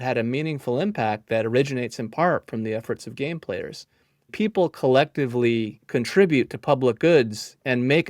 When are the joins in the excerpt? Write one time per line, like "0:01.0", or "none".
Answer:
0:04.3
0:05.8